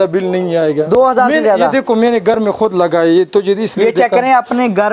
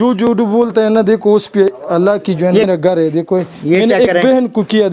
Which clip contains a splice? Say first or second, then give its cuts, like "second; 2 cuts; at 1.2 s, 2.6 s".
second; 1 cut; at 2.7 s